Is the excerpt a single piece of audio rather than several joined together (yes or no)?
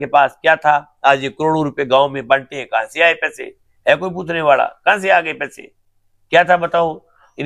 yes